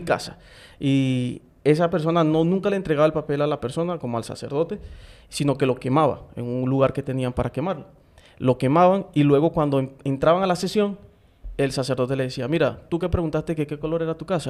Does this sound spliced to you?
no; 0 cuts

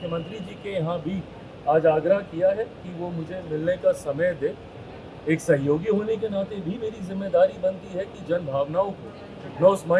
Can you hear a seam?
no; 0 cuts

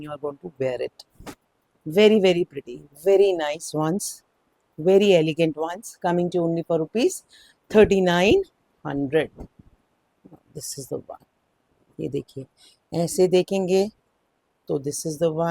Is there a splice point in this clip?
no; 0 cuts

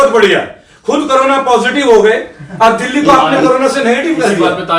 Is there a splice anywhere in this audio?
no; 0 cuts

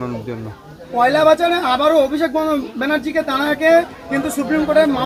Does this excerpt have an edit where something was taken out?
no; 0 cuts

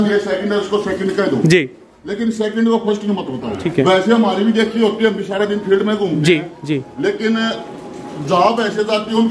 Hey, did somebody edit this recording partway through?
yes; 1 cut; at 3.6 s

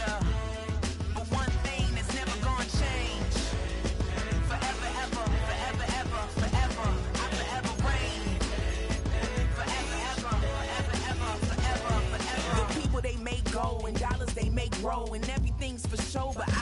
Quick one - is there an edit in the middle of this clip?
no; 0 cuts

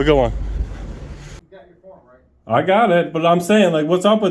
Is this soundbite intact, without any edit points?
no; 1 cut; at 1.4 s

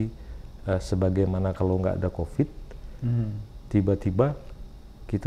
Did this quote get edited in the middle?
no; 0 cuts

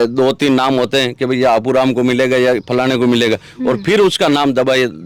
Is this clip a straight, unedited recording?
yes; 0 cuts

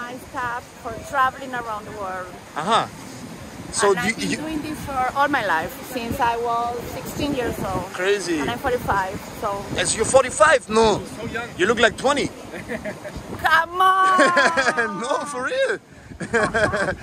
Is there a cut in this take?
no; 0 cuts

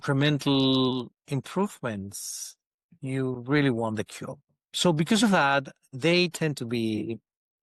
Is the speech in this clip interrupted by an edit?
no; 0 cuts

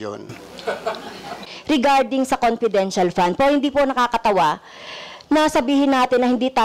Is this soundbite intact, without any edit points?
no; 1 cut; at 1.5 s

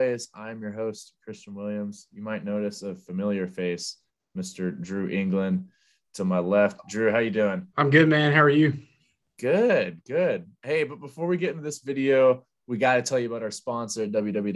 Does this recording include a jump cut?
yes; 1 cut; at 7.6 s

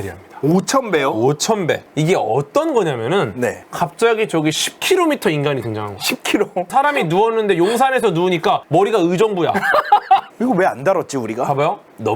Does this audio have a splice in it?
yes; 2 cuts; at 1.8 s, 10.3 s

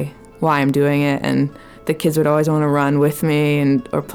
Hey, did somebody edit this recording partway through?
no; 0 cuts

